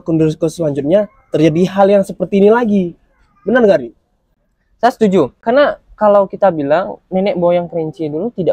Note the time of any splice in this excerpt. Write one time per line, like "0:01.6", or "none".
0:05.4